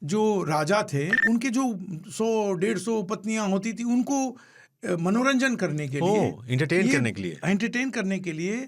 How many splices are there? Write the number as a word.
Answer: one